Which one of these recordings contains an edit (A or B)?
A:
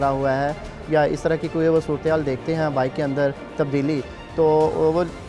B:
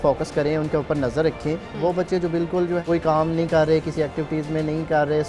B